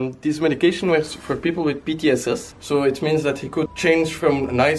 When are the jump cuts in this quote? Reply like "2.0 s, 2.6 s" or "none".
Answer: 2.5 s, 3.7 s